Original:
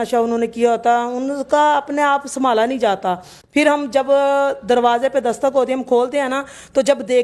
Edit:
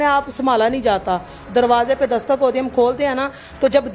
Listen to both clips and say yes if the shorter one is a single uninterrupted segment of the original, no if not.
no